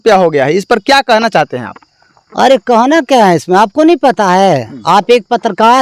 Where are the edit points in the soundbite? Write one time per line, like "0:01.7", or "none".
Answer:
none